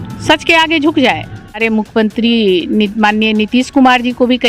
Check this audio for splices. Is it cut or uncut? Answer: cut